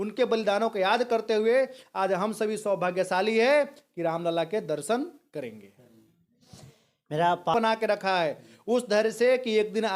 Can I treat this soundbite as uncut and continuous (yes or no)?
no